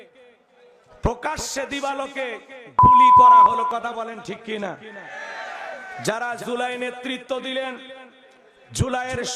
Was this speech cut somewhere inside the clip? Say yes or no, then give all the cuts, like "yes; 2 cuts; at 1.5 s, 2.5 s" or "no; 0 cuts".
no; 0 cuts